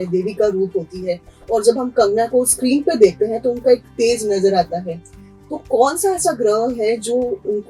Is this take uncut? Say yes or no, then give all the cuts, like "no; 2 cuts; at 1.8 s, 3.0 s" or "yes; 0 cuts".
yes; 0 cuts